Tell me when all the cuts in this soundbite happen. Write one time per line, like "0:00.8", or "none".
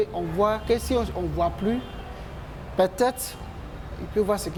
none